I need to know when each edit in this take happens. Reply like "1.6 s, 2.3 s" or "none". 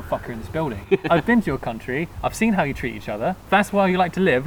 1.1 s, 3.4 s